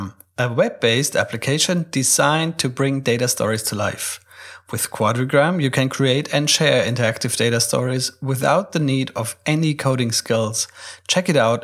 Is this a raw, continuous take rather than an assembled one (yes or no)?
yes